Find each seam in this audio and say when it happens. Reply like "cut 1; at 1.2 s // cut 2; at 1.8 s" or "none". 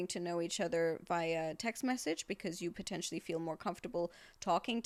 none

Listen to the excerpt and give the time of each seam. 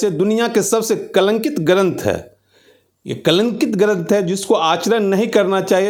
none

